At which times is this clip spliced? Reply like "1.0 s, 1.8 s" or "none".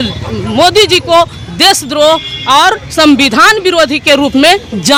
none